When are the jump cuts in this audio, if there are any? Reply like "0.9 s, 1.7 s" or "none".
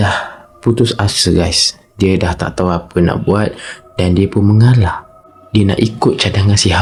none

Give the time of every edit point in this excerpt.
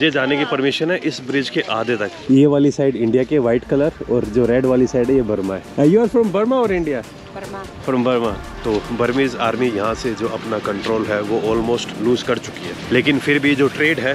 2.1 s, 5.6 s, 8.5 s

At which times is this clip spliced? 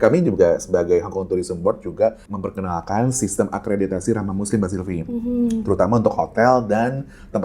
2.3 s

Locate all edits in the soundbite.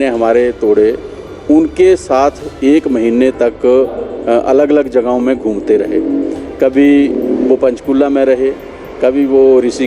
none

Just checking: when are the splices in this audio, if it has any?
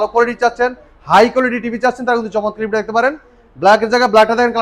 none

